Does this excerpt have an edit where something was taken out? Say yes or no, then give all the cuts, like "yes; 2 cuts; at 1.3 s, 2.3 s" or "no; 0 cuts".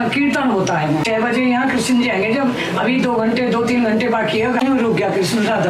yes; 2 cuts; at 1.0 s, 4.6 s